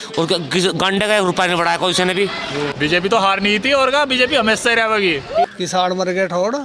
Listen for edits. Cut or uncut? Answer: cut